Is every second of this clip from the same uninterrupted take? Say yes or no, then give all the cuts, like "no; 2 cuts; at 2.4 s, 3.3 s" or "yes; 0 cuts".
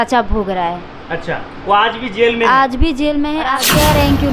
no; 1 cut; at 3.4 s